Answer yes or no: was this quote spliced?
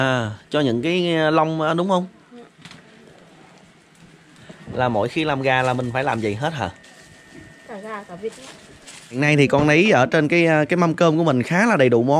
yes